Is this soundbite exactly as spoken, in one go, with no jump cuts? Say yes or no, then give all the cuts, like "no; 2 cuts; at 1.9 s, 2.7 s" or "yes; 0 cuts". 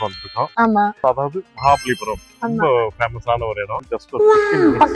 no; 1 cut; at 3.8 s